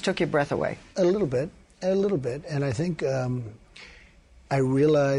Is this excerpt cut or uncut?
cut